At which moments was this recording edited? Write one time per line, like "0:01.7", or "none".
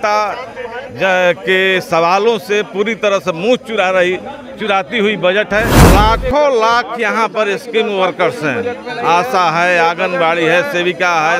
0:05.8